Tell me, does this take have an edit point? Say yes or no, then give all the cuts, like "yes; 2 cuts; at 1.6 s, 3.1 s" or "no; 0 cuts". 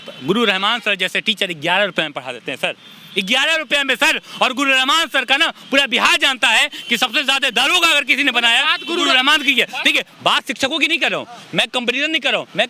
no; 0 cuts